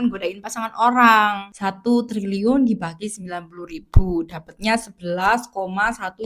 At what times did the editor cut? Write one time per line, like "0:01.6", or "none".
0:01.5